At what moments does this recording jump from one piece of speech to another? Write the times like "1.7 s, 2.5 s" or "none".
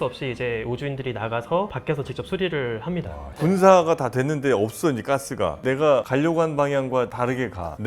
3.4 s, 5.6 s